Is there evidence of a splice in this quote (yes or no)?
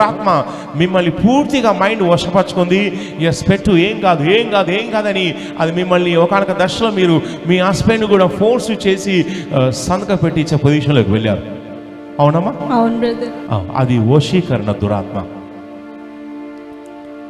no